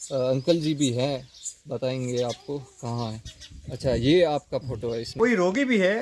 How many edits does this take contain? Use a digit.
1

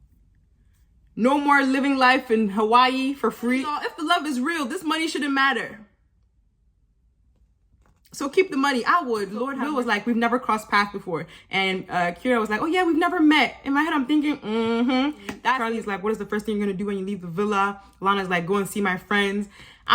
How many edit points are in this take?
3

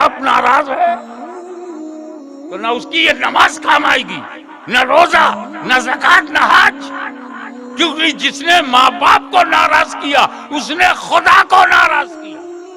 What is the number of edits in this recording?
0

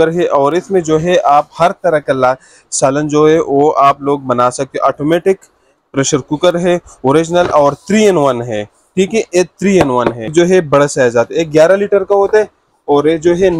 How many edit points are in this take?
1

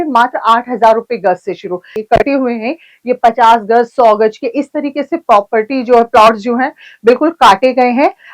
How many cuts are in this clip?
0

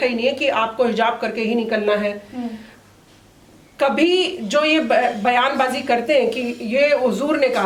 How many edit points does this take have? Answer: 0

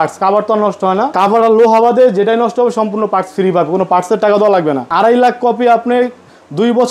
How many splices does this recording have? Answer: 2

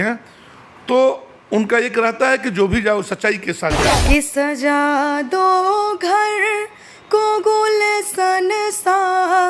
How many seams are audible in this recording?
1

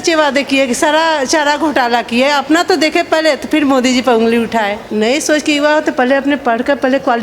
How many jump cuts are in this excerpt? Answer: 1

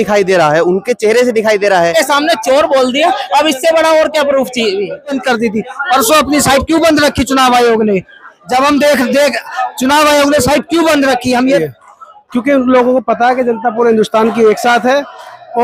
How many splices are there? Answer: 3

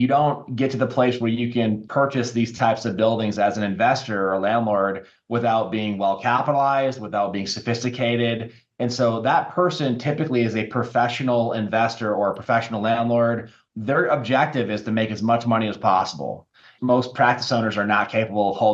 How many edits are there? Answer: 1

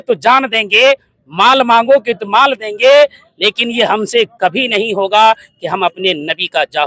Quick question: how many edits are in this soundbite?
0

